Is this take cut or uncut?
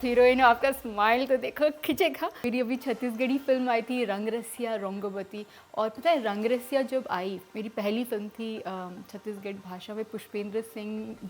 cut